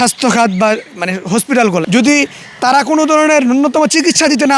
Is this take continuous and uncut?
no; 1 cut; at 1.8 s

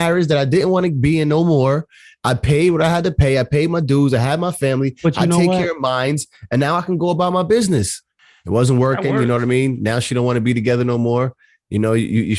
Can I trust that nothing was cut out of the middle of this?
no; 1 cut; at 8.1 s

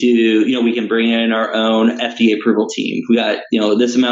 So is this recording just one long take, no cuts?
yes; 0 cuts

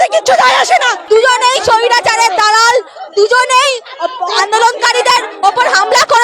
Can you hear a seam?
yes; 1 cut; at 1.0 s

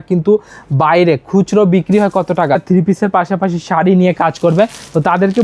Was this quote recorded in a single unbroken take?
no; 1 cut; at 2.6 s

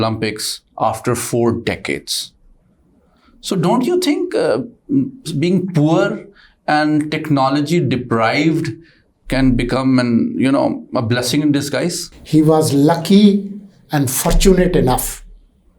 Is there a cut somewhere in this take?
yes; 1 cut; at 12.1 s

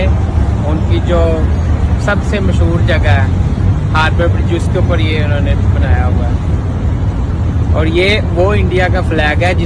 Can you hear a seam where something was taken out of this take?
no; 0 cuts

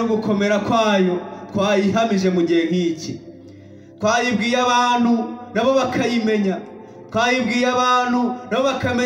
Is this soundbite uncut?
yes; 0 cuts

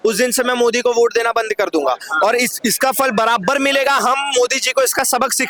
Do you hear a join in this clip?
no; 0 cuts

